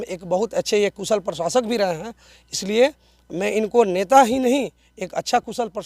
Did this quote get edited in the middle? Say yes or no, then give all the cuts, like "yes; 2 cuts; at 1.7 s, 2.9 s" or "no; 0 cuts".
no; 0 cuts